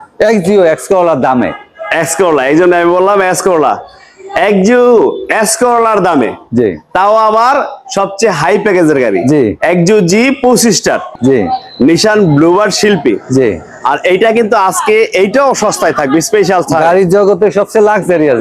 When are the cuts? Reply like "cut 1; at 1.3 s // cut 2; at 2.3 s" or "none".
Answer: cut 1; at 11.0 s